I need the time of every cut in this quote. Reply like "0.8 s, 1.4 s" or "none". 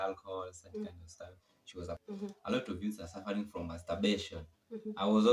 2.0 s